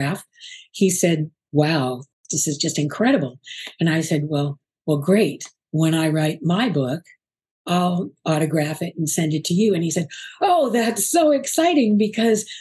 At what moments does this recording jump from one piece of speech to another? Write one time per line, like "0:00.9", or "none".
0:01.4
0:02.1